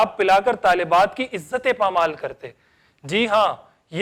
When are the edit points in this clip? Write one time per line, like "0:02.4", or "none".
none